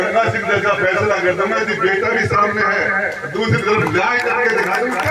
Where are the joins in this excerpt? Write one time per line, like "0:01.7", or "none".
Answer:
none